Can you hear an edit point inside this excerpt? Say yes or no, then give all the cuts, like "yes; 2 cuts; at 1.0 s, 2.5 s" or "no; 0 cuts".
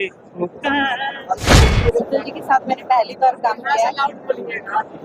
yes; 1 cut; at 1.6 s